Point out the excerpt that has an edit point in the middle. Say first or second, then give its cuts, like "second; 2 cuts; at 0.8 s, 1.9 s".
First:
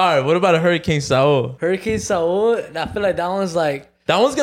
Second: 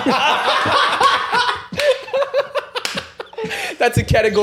first; 1 cut; at 1.5 s